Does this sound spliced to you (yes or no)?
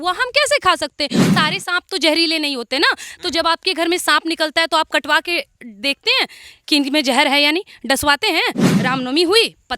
yes